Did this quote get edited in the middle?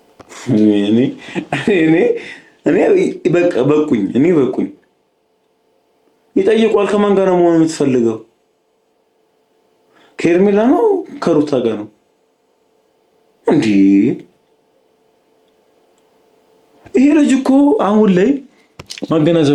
no; 0 cuts

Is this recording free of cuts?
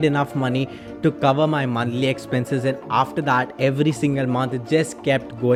yes; 0 cuts

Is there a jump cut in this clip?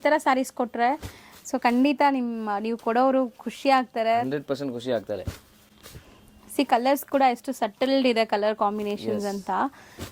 no; 0 cuts

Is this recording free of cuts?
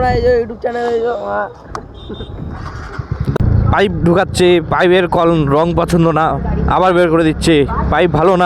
no; 1 cut; at 3.4 s

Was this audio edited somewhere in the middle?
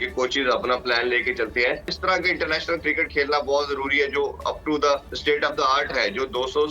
yes; 2 cuts; at 1.9 s, 5.1 s

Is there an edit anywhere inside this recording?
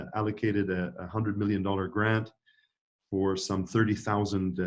no; 0 cuts

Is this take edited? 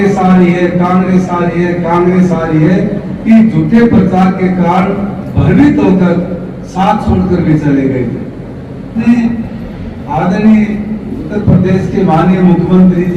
yes; 1 cut; at 9.0 s

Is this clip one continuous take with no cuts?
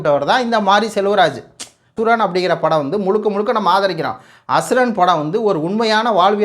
no; 1 cut; at 2.0 s

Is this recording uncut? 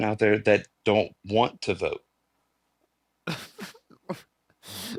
yes; 0 cuts

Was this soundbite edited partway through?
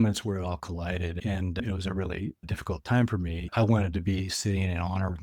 yes; 3 cuts; at 1.5 s, 2.5 s, 3.5 s

